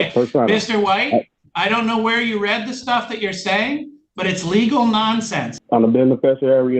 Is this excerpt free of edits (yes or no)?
no